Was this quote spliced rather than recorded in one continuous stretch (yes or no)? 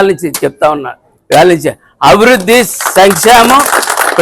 no